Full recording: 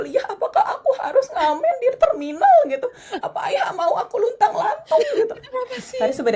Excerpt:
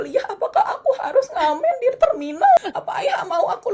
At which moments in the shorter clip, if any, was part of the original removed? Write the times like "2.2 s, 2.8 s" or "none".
2.6 s

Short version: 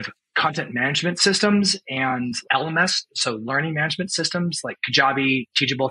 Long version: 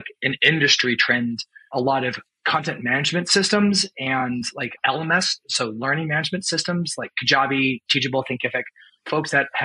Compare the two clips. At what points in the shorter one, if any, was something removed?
2.4 s

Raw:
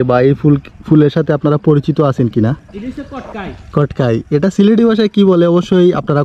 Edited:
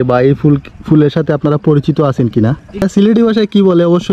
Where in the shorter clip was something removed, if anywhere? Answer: 2.8 s

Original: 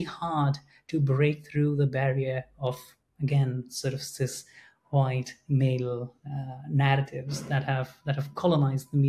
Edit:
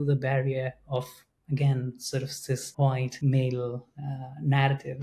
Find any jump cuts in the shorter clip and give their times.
3.0 s

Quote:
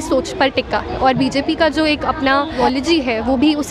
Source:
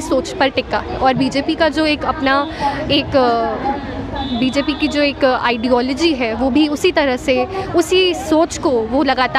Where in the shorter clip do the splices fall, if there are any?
2.6 s

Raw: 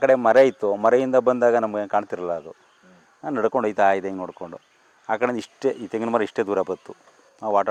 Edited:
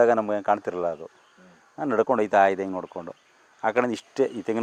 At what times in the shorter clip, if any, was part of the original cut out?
none

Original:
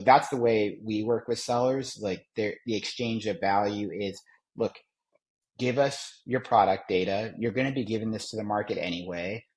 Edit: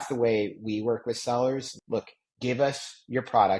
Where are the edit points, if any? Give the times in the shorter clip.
1.7 s

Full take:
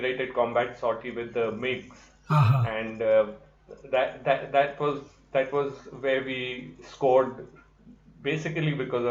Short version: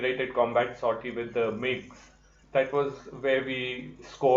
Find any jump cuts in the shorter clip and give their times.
2.2 s

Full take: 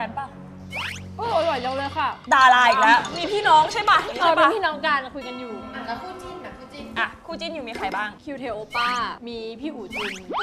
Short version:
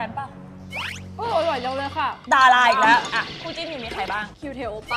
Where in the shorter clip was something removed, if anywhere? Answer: 3.2 s

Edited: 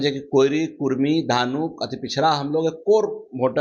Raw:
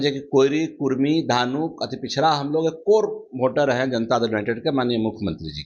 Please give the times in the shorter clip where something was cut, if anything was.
none

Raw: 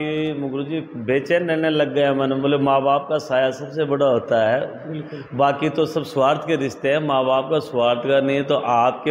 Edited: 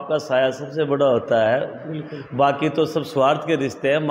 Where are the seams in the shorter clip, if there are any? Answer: none

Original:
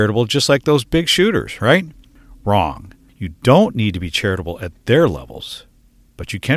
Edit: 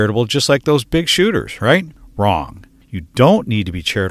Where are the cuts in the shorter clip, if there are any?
2.0 s

